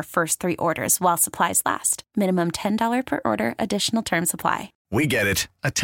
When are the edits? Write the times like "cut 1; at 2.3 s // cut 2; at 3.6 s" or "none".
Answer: cut 1; at 4.7 s